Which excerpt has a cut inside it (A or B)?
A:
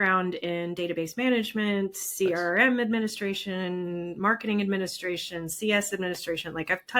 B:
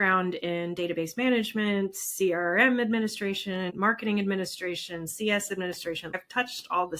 B